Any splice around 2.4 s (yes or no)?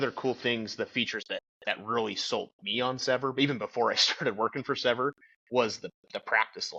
no